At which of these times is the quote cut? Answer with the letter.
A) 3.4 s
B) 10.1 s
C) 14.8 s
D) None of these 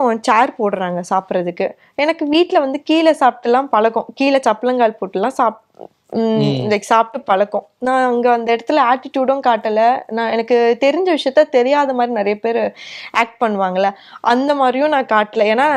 D